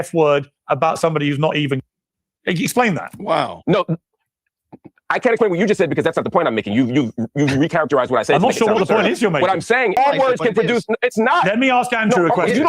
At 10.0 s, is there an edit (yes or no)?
yes